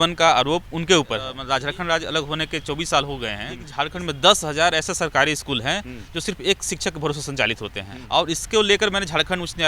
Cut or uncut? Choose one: cut